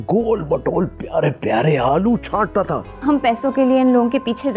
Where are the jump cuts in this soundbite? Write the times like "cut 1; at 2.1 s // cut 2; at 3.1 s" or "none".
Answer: cut 1; at 2.9 s